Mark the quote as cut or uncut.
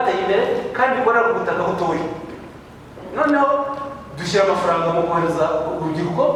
uncut